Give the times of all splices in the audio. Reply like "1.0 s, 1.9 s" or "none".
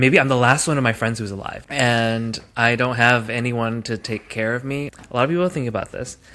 4.9 s

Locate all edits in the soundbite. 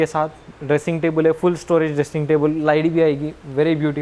none

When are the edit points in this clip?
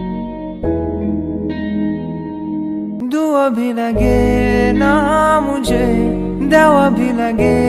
none

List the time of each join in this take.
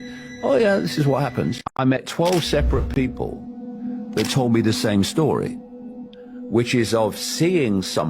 none

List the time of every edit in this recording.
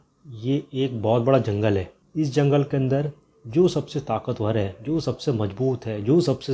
2.0 s

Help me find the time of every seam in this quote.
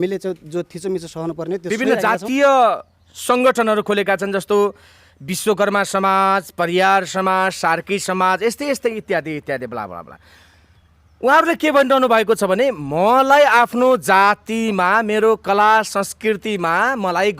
1.8 s

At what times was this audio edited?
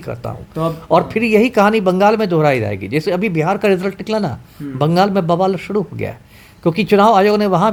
none

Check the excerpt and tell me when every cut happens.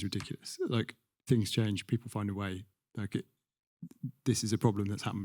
1.1 s

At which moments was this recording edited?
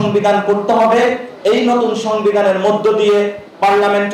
none

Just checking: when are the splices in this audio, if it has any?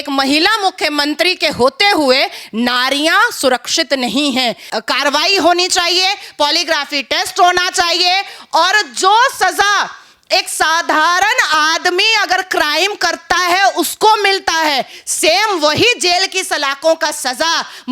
4.7 s

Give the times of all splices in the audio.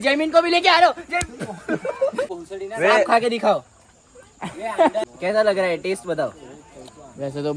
2.3 s, 5.0 s

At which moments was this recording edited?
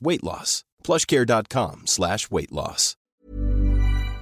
2.9 s

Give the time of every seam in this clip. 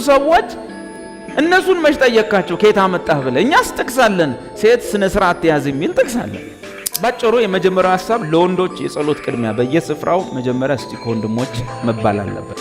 6.8 s

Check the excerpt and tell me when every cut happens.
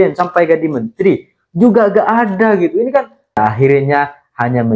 3.4 s

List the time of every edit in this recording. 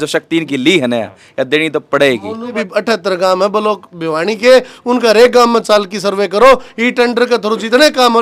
2.6 s

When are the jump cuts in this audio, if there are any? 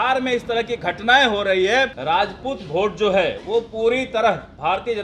2.0 s

